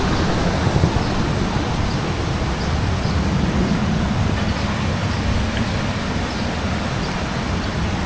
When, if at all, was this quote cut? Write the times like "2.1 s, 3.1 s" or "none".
none